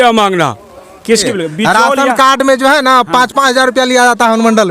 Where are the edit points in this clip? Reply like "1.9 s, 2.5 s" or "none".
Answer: 1.2 s